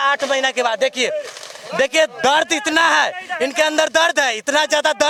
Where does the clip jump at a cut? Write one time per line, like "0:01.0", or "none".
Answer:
none